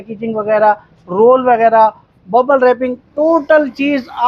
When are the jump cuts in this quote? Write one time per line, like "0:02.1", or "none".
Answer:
none